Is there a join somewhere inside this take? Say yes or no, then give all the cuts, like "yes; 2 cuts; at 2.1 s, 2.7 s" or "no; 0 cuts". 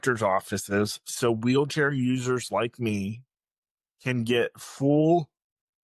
no; 0 cuts